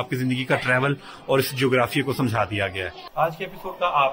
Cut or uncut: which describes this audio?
cut